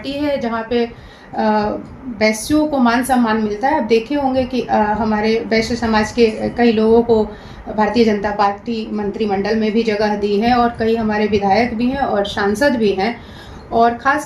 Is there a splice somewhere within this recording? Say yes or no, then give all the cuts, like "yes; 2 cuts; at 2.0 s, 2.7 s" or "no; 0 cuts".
no; 0 cuts